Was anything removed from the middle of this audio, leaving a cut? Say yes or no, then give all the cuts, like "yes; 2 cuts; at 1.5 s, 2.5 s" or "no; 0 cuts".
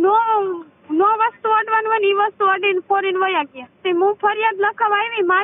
yes; 1 cut; at 3.8 s